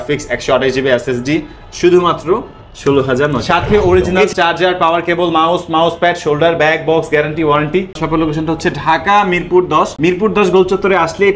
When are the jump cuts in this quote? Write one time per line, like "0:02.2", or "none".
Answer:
0:03.4
0:08.0